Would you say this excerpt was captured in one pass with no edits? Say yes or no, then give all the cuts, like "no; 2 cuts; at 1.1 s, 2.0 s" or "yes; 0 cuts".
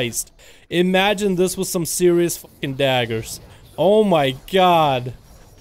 yes; 0 cuts